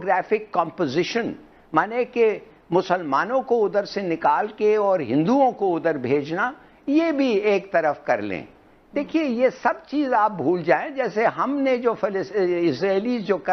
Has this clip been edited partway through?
no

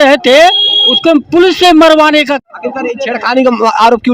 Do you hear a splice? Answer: yes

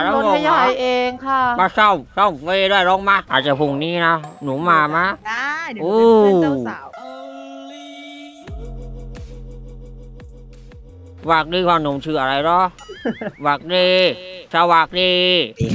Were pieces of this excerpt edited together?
yes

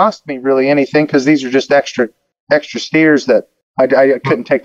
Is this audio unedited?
no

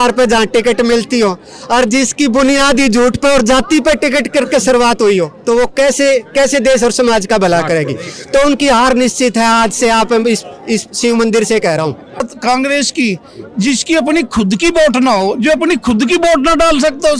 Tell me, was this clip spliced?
yes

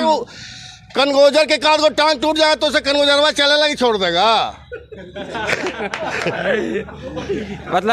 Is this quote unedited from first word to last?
yes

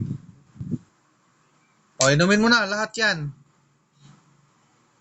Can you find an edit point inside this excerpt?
yes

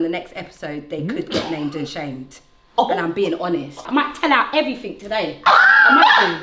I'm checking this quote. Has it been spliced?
yes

